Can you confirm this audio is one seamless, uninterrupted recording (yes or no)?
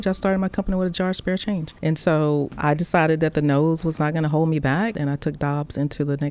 no